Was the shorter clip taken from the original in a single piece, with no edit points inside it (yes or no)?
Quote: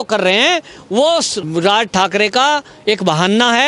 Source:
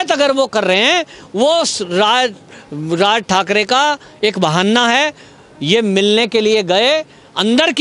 no